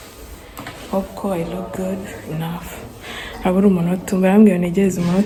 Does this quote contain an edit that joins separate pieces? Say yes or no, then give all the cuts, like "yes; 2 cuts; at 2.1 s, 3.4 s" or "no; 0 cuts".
no; 0 cuts